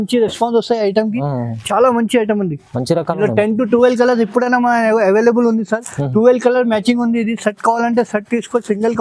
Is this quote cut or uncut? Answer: uncut